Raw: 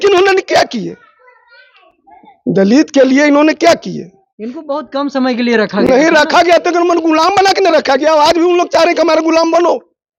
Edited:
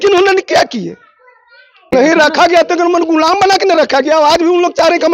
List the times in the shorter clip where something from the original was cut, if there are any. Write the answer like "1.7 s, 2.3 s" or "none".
1.9 s